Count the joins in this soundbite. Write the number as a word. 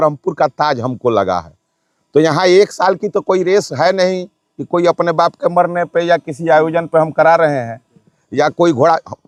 zero